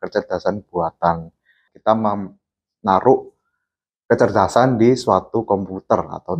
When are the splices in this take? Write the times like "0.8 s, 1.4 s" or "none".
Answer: 1.7 s